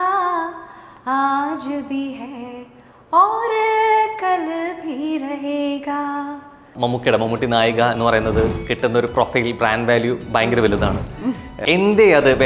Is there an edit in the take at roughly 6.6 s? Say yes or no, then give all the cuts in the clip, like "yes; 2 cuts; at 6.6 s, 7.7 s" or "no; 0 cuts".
yes; 2 cuts; at 6.6 s, 11.5 s